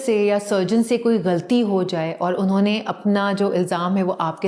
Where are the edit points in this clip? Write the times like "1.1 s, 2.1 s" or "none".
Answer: none